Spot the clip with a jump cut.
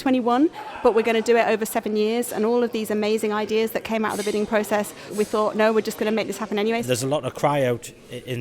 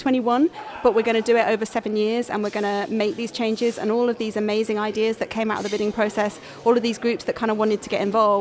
first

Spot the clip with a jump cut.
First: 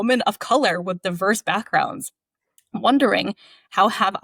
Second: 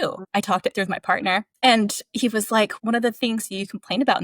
second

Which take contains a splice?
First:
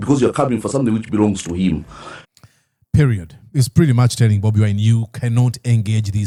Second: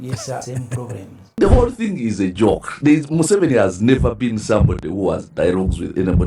second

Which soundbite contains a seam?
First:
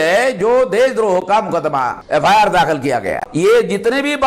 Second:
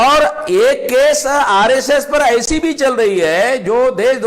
first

